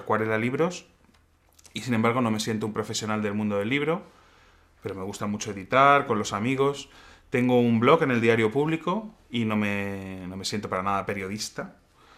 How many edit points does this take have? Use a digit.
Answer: 1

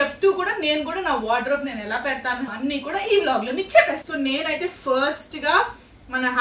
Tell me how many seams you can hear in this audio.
2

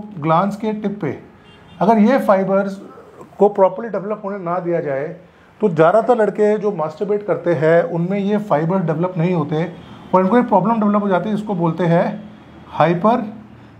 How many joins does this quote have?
0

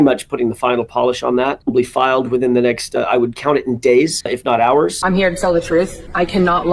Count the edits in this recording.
3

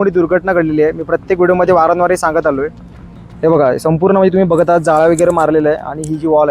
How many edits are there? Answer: 1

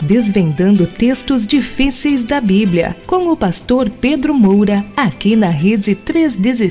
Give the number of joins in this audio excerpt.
1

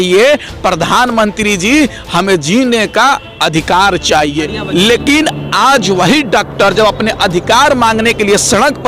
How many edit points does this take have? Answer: 1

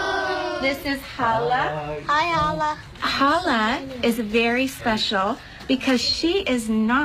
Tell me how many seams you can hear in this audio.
0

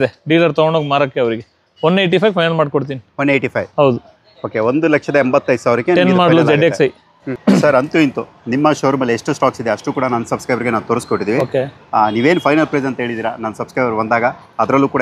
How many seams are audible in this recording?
0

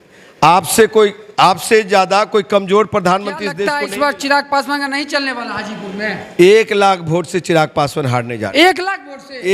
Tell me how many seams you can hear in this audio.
1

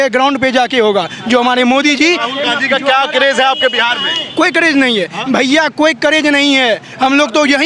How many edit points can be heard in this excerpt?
0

